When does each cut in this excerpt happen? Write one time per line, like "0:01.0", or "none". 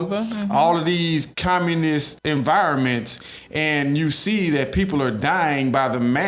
0:02.1